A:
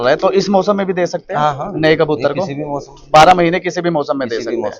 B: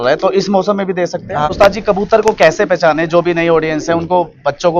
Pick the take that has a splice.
B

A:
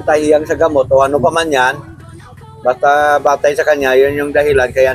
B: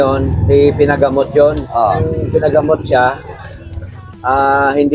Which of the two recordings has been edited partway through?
B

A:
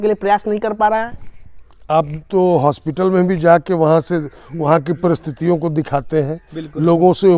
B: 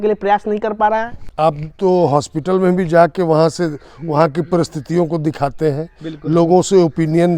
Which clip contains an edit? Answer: B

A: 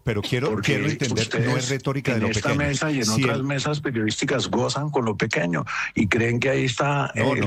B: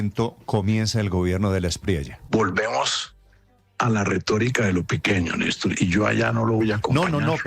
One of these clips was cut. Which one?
B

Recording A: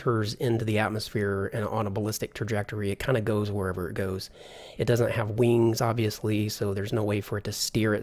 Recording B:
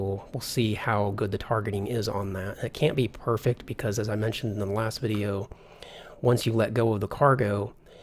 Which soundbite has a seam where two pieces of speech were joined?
A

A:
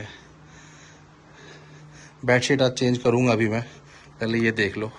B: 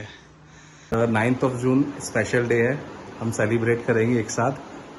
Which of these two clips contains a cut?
B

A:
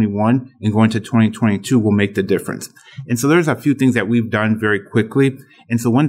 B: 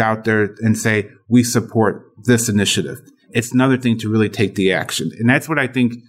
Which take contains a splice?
B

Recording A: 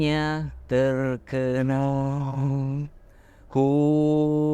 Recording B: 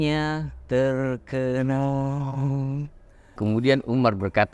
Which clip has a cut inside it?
B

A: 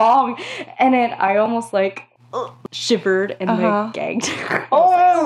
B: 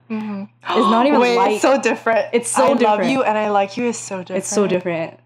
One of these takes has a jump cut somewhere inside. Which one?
A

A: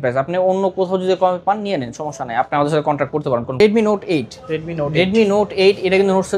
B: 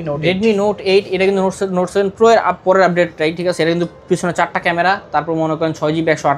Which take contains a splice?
A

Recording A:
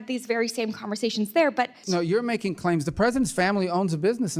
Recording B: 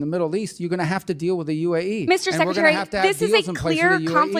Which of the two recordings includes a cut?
A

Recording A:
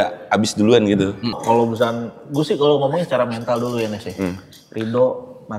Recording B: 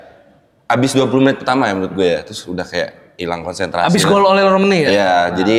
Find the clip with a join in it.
A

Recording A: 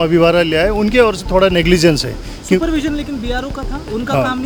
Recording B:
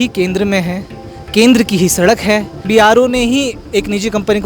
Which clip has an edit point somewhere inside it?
B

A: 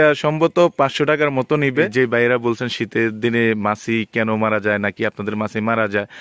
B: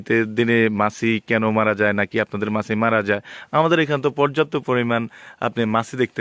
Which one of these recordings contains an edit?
A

